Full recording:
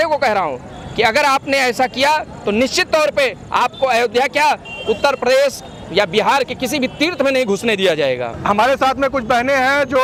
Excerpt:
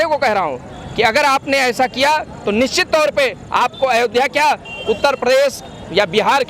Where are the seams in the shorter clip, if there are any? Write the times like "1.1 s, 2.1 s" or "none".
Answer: none